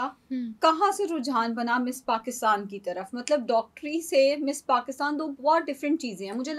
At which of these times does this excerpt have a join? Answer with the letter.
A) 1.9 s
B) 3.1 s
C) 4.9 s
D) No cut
D